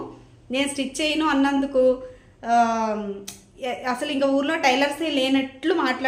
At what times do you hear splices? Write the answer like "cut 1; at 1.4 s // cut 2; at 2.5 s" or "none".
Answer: none